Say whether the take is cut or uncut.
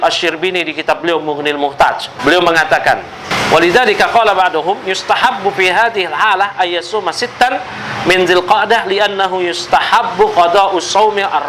cut